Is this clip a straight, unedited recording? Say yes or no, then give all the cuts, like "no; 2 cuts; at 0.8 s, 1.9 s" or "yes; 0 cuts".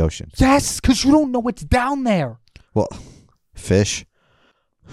yes; 0 cuts